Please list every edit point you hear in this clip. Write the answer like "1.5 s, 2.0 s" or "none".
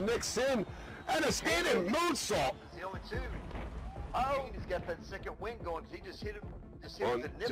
none